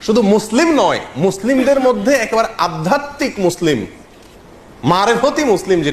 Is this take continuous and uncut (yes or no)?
yes